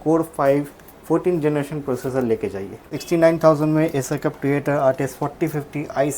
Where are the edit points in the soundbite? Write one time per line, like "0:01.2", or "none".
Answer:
0:02.9